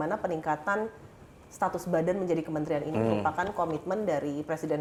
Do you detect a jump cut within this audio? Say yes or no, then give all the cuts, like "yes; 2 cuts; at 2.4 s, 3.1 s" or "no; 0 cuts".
no; 0 cuts